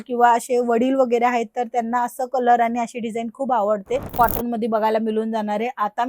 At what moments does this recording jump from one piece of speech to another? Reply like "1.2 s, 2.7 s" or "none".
4.1 s